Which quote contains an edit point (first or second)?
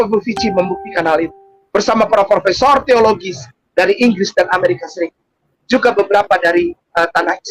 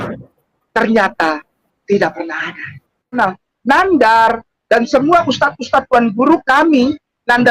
second